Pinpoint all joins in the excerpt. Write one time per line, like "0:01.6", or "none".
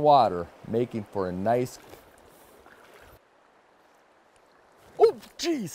0:01.8